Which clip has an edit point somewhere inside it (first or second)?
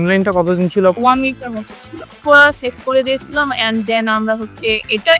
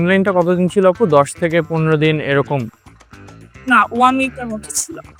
first